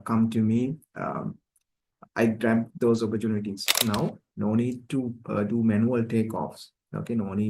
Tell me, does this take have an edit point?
yes; 1 cut; at 3.8 s

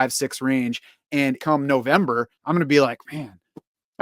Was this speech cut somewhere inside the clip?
yes; 2 cuts; at 1.4 s, 2.3 s

